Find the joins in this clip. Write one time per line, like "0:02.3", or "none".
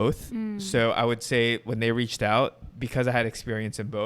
0:02.6